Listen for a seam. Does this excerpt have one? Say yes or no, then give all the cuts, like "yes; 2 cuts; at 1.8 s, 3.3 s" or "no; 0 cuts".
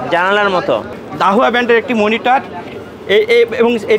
yes; 1 cut; at 1.0 s